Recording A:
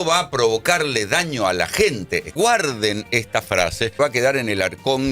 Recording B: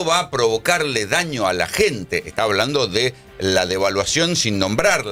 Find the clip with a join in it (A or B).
A